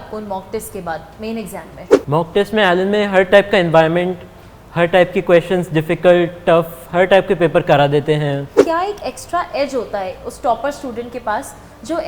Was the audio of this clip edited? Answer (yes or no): yes